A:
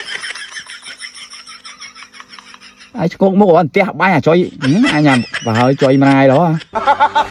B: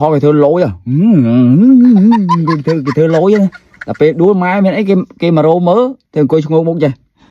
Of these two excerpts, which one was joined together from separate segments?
B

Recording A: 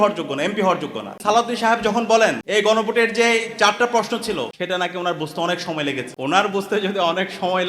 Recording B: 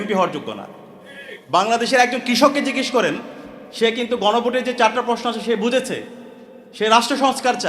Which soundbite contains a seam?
A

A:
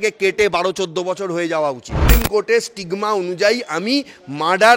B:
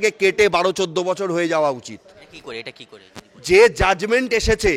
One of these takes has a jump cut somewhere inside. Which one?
A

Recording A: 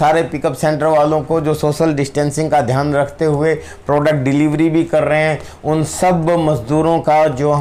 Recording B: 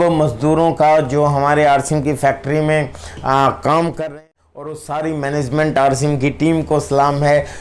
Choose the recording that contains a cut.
B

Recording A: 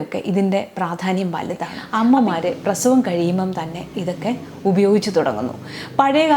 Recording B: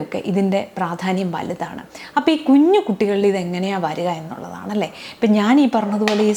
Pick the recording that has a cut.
A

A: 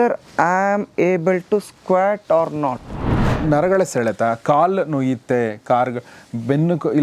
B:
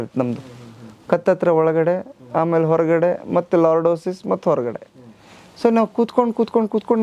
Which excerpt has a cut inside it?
A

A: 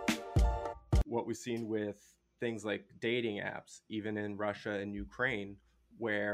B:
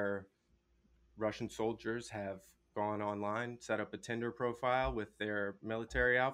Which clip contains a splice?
A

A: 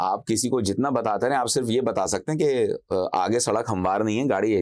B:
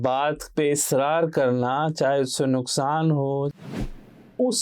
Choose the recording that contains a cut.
B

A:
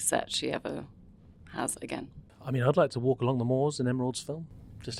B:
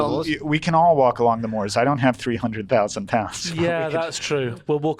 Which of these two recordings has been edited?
A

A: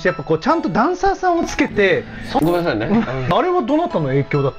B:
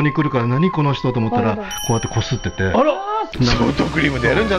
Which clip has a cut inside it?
A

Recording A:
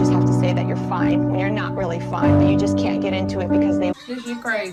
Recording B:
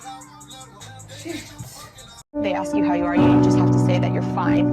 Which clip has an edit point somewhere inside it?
B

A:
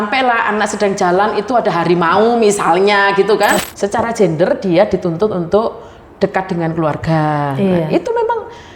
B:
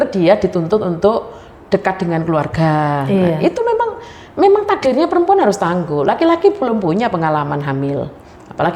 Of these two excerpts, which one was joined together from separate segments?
A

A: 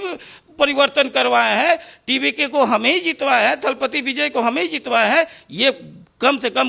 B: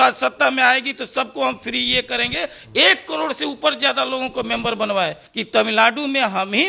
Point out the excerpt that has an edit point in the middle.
B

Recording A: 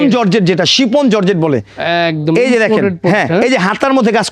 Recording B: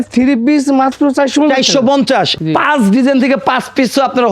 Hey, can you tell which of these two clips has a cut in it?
B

